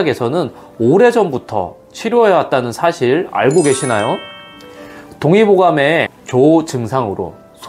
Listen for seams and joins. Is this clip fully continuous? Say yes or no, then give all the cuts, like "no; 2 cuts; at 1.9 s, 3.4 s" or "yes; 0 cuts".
no; 1 cut; at 6.2 s